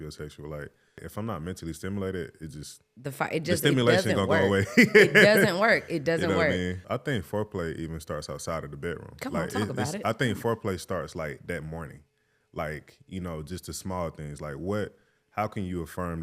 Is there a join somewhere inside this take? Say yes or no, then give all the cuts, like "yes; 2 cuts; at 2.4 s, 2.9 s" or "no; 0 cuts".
yes; 2 cuts; at 1.0 s, 6.8 s